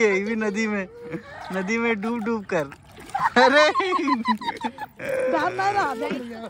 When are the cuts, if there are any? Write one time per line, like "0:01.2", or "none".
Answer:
none